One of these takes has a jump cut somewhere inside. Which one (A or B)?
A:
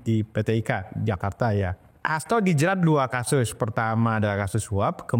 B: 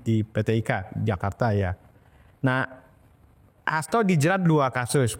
A